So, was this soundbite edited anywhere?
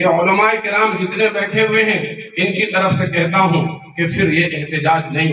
no; 0 cuts

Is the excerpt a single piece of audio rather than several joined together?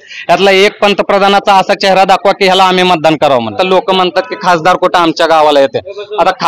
no; 1 cut; at 3.5 s

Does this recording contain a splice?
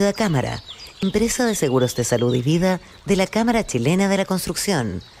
yes; 1 cut; at 1.0 s

